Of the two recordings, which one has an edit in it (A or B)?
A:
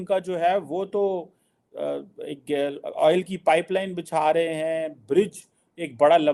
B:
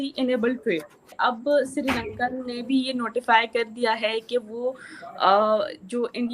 B